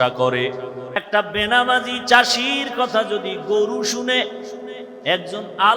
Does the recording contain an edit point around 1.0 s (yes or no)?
yes